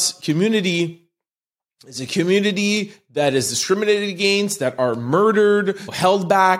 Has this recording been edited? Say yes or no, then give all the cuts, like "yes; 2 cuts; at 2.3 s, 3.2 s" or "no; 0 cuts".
no; 0 cuts